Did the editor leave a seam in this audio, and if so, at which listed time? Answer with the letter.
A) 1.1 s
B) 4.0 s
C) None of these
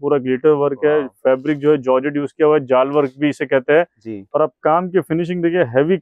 C